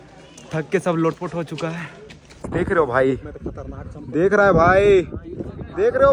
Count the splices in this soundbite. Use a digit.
1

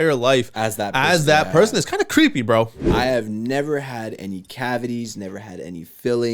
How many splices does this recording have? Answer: 1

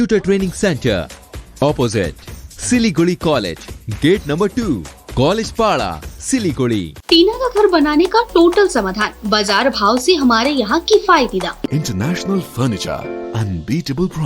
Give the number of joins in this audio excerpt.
2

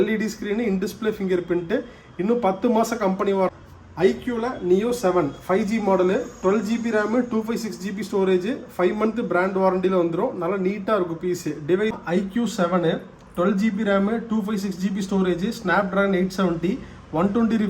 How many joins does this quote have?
2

